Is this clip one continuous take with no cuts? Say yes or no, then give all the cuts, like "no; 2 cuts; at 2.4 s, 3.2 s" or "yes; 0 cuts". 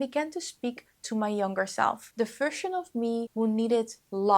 no; 2 cuts; at 2.0 s, 3.3 s